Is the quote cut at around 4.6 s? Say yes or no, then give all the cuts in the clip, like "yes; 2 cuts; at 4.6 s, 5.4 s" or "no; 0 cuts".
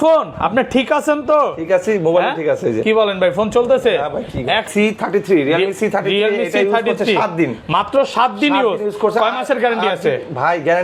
yes; 1 cut; at 4.6 s